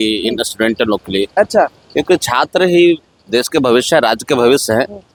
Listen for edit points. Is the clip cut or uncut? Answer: uncut